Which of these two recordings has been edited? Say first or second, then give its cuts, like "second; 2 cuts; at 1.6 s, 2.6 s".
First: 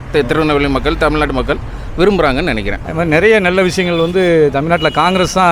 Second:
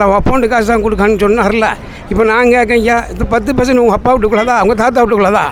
first; 1 cut; at 2.8 s